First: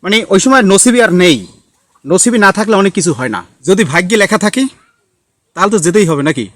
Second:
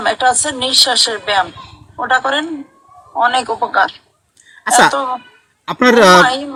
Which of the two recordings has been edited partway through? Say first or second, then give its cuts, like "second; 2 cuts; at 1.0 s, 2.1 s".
first; 1 cut; at 3.5 s